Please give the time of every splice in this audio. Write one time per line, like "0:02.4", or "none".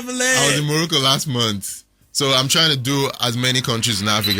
none